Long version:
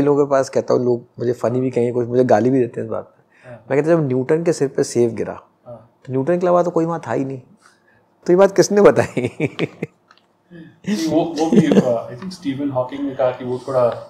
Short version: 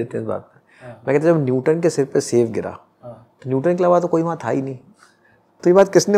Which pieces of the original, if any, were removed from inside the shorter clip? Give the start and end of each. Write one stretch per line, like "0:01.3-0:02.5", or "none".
none